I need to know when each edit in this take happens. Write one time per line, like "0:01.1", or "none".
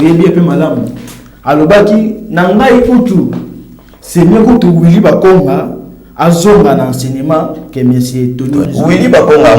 0:08.7

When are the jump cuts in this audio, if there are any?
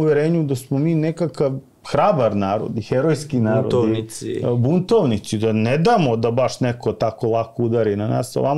none

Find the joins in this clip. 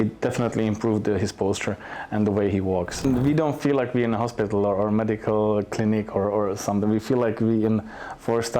0:03.0

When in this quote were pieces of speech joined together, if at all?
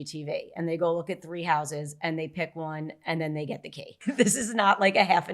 0:04.0

